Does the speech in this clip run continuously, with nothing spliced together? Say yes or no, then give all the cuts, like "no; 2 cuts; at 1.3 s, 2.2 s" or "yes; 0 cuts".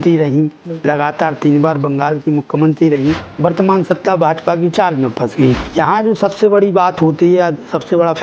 no; 2 cuts; at 3.3 s, 5.6 s